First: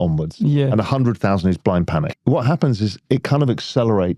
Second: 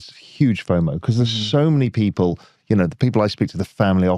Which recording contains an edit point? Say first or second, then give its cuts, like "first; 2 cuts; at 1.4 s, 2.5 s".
first; 1 cut; at 2.1 s